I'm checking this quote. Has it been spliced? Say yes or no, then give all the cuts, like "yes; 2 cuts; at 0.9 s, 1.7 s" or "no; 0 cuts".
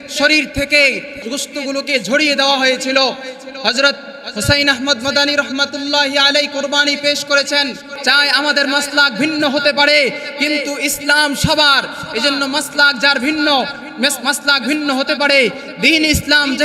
yes; 2 cuts; at 1.2 s, 7.9 s